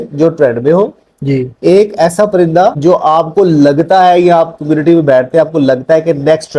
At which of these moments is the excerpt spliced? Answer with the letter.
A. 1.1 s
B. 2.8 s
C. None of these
B